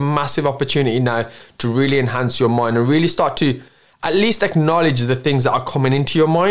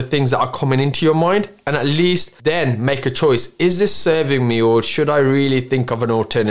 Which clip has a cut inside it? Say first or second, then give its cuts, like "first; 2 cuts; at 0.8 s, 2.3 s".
second; 1 cut; at 2.3 s